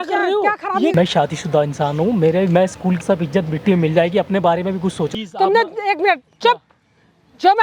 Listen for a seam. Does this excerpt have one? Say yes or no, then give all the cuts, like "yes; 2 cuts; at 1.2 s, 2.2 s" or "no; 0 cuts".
yes; 3 cuts; at 0.9 s, 3.0 s, 5.1 s